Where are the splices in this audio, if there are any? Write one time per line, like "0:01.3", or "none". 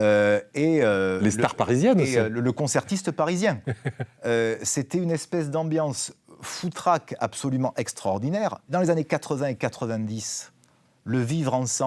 0:08.6

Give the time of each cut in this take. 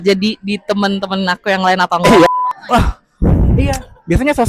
0:02.3

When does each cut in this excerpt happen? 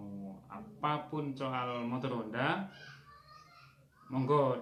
none

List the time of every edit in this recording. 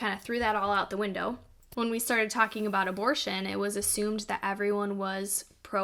0:01.6

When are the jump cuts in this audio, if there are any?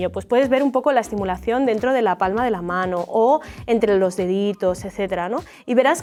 none

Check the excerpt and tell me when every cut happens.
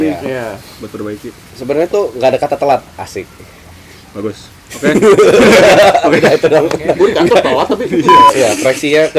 0:08.2

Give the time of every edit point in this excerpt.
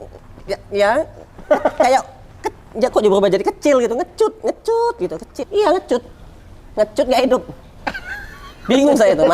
0:05.4

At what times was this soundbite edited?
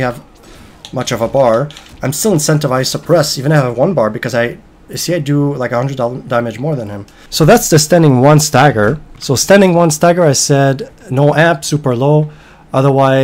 none

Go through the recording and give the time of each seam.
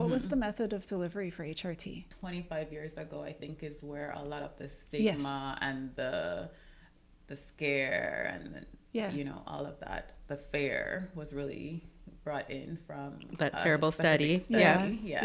0:02.1

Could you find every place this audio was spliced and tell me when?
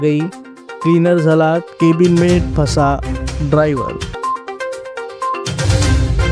0:04.1
0:05.5

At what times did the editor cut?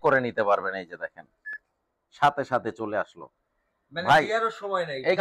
none

